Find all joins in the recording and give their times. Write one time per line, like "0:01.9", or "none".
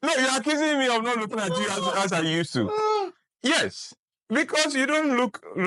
none